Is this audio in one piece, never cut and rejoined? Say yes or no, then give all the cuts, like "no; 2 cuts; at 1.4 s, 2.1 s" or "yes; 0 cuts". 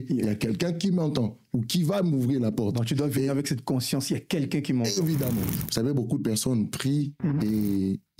no; 1 cut; at 5.5 s